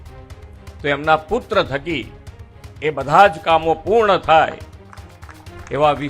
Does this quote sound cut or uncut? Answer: uncut